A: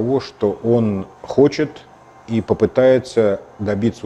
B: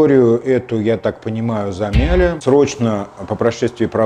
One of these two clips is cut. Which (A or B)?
B